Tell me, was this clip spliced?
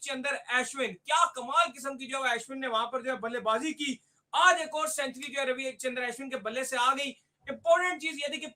no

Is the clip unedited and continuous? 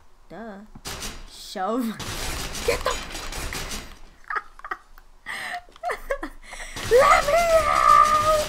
yes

